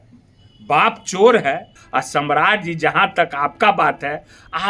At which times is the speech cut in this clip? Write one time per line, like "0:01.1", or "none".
0:01.7